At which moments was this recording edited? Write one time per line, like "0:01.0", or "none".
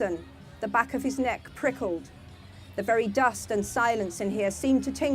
none